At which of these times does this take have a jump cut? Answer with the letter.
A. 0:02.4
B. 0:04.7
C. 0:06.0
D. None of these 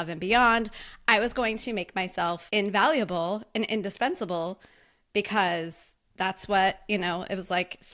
A